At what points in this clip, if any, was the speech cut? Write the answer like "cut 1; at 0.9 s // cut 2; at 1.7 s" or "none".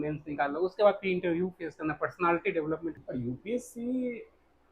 cut 1; at 3.0 s